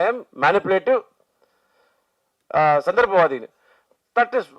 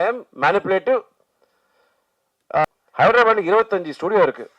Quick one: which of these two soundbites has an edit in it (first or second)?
second